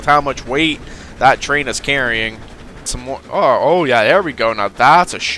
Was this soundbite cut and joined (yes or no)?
yes